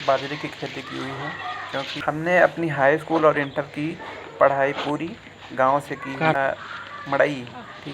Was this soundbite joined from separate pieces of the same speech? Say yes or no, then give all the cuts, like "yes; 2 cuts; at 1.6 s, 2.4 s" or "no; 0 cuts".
yes; 2 cuts; at 2.0 s, 6.4 s